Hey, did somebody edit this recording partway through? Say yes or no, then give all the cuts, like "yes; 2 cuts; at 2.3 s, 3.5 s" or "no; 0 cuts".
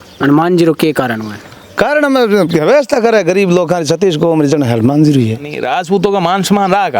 yes; 1 cut; at 5.6 s